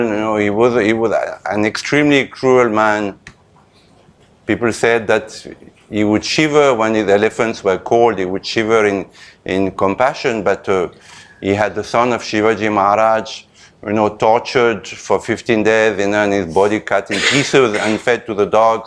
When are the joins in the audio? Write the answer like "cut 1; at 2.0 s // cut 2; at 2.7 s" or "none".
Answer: none